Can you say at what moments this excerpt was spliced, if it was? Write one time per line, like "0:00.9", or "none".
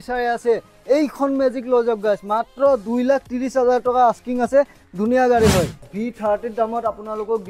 0:05.8